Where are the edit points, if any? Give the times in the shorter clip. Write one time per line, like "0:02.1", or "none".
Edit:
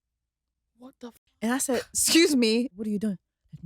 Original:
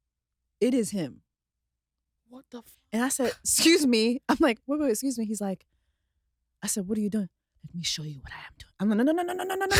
0:02.7